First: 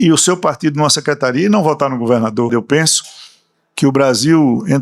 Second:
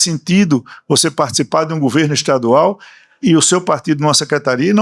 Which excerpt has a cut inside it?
first; 1 cut; at 2.5 s

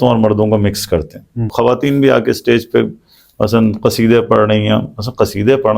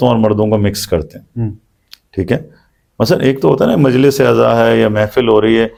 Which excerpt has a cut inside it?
first; 1 cut; at 1.5 s

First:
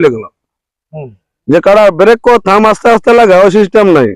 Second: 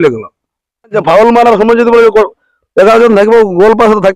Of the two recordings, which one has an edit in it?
second; 1 cut; at 1.0 s

